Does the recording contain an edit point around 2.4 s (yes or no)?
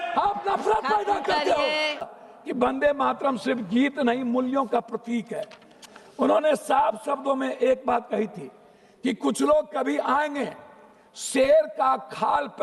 yes